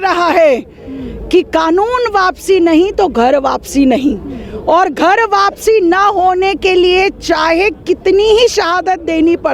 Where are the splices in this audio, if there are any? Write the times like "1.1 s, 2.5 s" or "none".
none